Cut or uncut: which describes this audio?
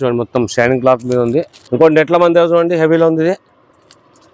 cut